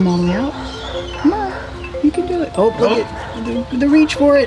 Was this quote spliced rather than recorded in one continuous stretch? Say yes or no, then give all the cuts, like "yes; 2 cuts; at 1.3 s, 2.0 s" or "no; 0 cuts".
no; 0 cuts